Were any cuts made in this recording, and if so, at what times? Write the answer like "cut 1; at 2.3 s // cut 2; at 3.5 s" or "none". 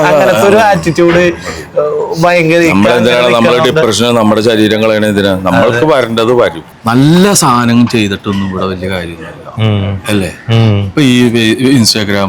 cut 1; at 6.7 s